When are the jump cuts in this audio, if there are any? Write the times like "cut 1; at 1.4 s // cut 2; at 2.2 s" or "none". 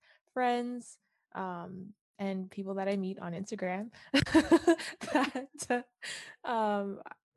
cut 1; at 2.0 s